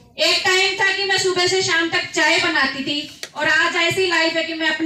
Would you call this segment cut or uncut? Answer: uncut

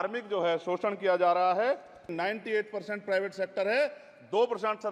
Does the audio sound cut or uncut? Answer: cut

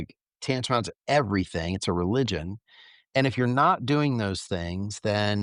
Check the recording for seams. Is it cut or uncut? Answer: uncut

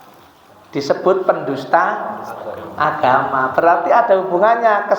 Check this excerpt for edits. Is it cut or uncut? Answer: uncut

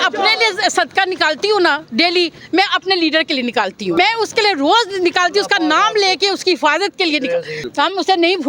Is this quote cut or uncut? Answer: cut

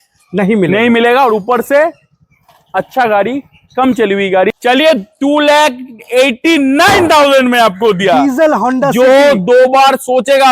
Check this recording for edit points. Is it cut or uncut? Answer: cut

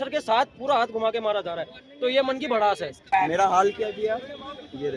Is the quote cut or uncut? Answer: cut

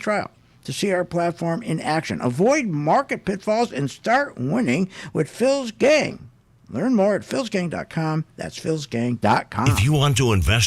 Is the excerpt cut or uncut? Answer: cut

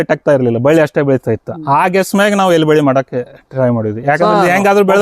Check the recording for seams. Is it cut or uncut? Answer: uncut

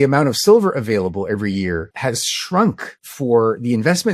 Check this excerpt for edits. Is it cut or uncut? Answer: cut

